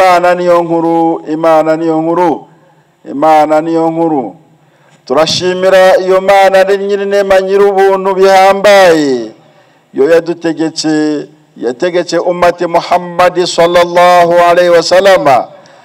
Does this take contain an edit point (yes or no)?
no